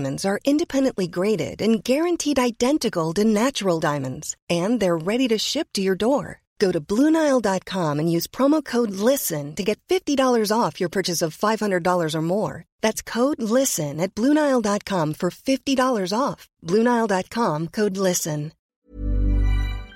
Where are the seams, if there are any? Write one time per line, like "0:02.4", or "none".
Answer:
0:18.6